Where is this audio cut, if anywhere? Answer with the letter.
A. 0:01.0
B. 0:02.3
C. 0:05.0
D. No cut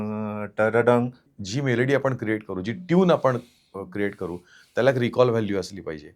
A